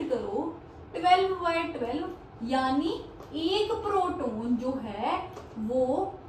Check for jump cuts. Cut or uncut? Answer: uncut